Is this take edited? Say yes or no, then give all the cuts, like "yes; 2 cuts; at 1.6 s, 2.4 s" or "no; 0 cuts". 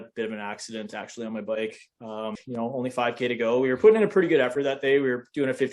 yes; 1 cut; at 2.4 s